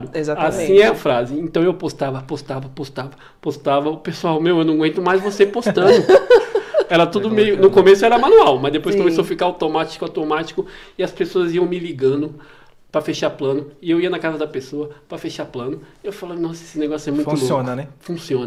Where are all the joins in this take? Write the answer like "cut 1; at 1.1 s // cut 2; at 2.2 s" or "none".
none